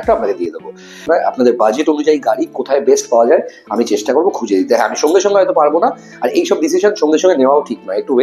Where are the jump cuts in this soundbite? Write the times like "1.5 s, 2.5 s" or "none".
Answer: 1.0 s